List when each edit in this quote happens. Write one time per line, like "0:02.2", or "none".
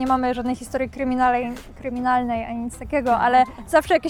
none

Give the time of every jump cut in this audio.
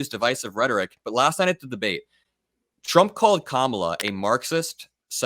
0:01.0

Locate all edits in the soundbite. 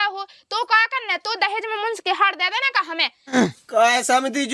0:03.1

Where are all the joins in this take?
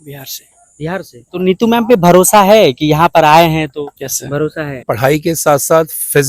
0:01.2
0:03.9
0:04.9

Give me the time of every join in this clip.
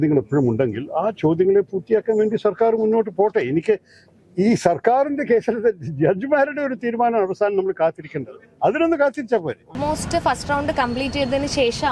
0:09.8

